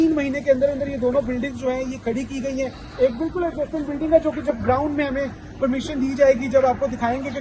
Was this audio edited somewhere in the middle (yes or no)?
no